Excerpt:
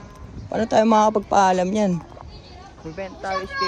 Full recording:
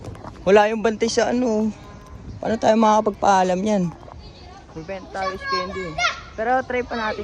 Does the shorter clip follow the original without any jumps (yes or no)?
yes